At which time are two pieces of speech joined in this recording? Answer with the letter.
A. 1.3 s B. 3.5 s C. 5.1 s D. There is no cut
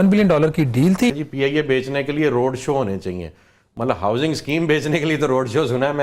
A